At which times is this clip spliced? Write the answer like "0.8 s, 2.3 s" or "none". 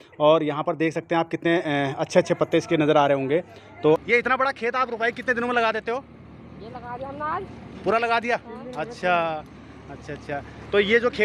4.0 s